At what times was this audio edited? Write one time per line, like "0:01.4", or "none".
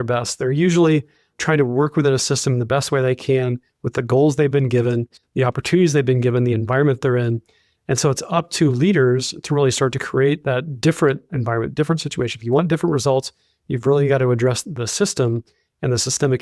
0:01.3